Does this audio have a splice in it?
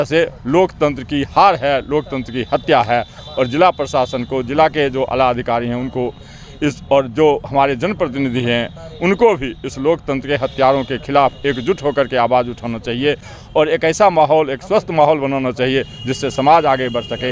no; 0 cuts

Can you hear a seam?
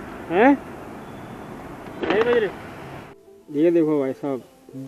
yes; 1 cut; at 3.4 s

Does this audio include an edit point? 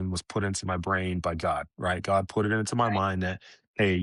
no; 0 cuts

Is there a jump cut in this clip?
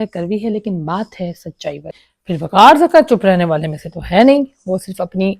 yes; 1 cut; at 2.2 s

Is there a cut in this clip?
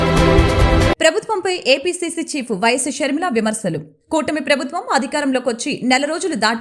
yes; 1 cut; at 1.0 s

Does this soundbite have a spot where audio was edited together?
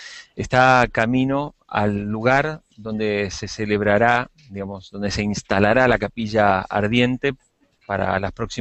yes; 1 cut; at 5.4 s

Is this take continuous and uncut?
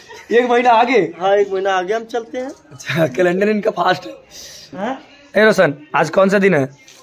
no; 1 cut; at 4.8 s

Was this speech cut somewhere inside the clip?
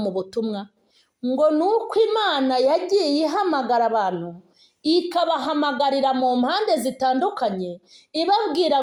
no; 0 cuts

